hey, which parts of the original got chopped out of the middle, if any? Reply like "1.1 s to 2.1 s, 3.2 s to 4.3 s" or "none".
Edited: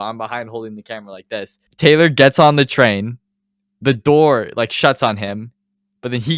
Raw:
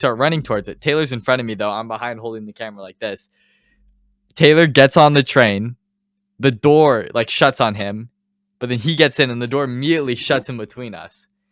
3.3 s to 4.2 s